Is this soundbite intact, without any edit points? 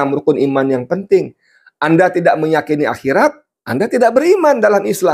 yes; 0 cuts

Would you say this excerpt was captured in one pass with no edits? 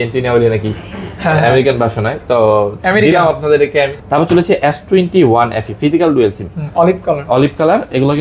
no; 1 cut; at 4.0 s

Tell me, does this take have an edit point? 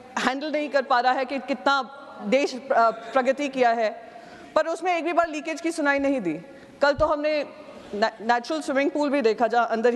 no; 0 cuts

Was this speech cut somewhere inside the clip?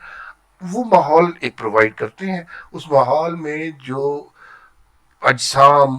no; 0 cuts

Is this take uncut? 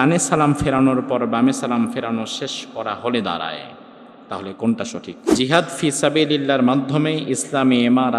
no; 1 cut; at 5.3 s

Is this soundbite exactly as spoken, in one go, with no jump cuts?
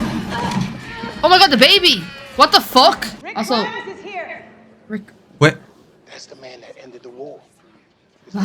no; 1 cut; at 3.2 s

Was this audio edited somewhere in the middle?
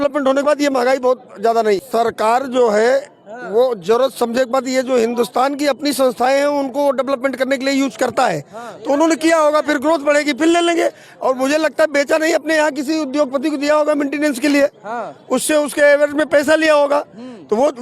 no; 0 cuts

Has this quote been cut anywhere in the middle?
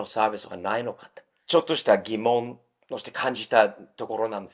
no; 0 cuts

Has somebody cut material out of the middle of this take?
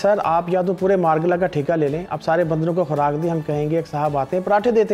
no; 0 cuts

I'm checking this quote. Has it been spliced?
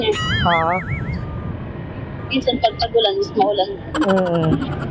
no; 0 cuts

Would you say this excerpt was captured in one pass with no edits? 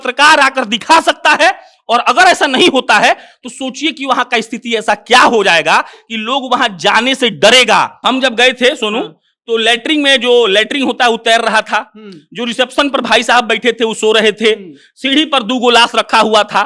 no; 1 cut; at 7.9 s

